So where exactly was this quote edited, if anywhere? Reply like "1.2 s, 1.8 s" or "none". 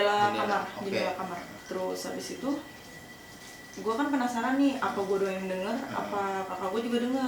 none